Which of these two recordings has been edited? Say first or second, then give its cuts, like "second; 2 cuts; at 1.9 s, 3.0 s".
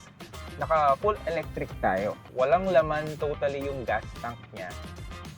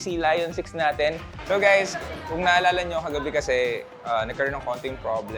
second; 1 cut; at 1.3 s